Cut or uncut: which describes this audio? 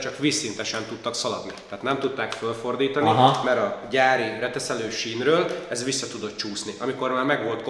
uncut